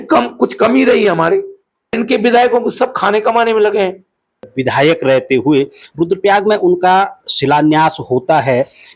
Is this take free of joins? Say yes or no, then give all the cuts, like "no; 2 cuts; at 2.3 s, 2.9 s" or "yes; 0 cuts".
no; 2 cuts; at 1.9 s, 4.5 s